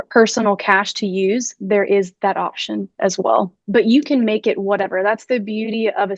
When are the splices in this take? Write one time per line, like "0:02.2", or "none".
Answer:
0:03.6